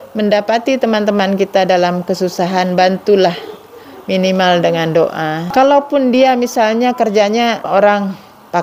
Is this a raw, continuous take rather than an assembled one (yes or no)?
no